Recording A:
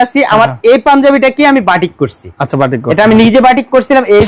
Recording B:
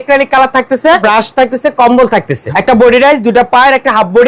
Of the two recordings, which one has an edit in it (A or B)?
B